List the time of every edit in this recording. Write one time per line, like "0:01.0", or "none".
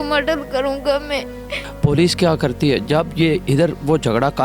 0:01.6